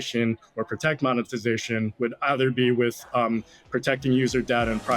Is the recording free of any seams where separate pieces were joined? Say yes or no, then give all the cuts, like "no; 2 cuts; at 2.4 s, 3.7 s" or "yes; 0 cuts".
yes; 0 cuts